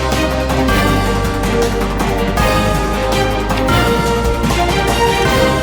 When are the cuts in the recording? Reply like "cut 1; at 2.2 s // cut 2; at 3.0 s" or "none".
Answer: none